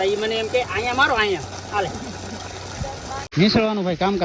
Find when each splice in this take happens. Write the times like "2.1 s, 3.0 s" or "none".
3.3 s